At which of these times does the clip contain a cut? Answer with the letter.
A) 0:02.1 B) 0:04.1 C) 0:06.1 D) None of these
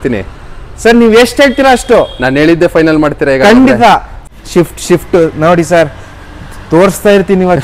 B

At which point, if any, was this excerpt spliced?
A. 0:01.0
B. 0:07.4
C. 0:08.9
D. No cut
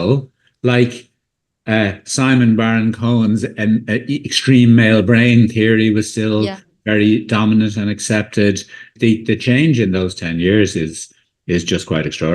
C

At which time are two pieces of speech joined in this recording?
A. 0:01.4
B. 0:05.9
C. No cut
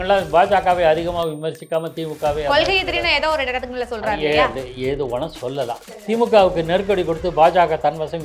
B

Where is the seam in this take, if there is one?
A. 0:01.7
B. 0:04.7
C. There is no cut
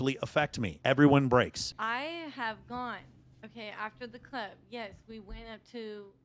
A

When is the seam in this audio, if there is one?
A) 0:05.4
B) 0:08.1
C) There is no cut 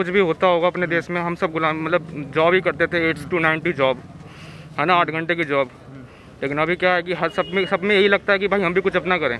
C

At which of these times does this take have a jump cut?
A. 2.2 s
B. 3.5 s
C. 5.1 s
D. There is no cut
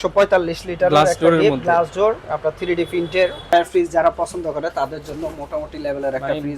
B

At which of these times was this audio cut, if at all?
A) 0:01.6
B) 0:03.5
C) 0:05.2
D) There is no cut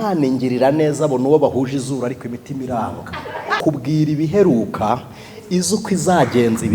B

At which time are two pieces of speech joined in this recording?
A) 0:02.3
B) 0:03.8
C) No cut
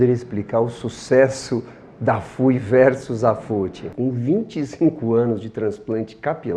C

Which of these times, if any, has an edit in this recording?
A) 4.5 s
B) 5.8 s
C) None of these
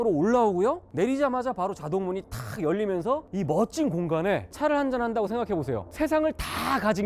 A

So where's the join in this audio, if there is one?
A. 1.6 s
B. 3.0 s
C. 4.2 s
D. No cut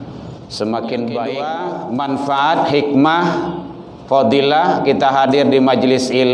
A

